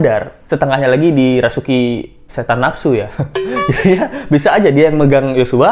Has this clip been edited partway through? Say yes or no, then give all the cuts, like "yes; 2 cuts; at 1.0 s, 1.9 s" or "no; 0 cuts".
no; 0 cuts